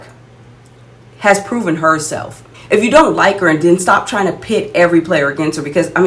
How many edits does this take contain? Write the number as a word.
one